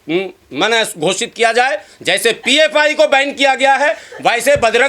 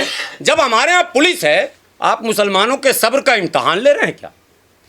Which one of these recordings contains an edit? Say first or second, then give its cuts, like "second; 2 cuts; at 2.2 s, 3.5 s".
second; 1 cut; at 1.8 s